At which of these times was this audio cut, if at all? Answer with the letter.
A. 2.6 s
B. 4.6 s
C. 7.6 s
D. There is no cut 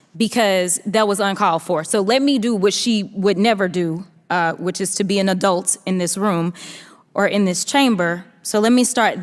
D